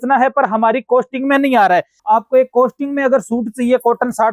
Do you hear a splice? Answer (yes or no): yes